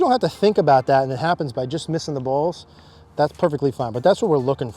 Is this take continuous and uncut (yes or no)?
yes